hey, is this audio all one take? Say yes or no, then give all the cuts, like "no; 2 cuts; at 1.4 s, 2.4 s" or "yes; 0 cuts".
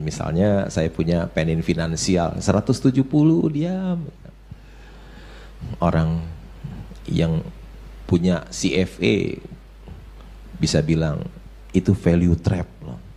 yes; 0 cuts